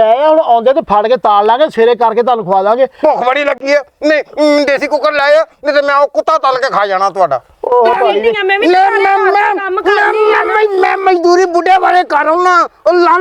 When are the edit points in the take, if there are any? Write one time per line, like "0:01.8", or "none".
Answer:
0:08.4